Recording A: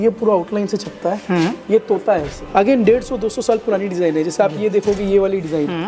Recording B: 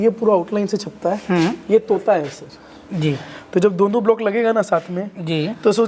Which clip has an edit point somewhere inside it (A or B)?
A